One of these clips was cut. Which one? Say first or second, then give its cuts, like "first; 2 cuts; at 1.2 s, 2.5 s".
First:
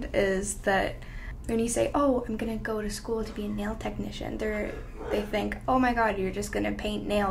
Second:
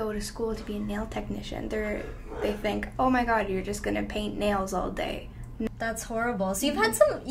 second; 1 cut; at 5.7 s